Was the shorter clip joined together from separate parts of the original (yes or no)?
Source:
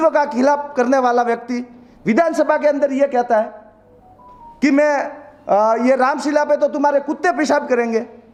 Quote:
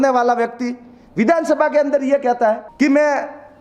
yes